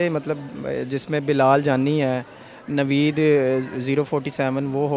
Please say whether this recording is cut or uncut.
uncut